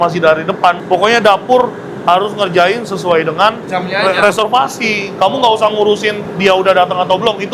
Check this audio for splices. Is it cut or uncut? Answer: uncut